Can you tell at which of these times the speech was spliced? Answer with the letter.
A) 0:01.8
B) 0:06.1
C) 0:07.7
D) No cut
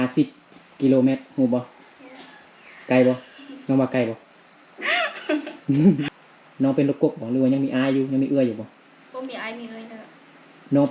B